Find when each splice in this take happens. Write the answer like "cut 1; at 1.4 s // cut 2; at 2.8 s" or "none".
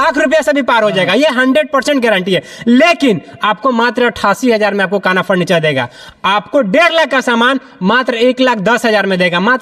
none